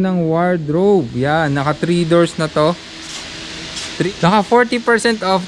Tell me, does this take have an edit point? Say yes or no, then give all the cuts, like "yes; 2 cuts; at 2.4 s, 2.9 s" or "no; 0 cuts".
yes; 1 cut; at 3.9 s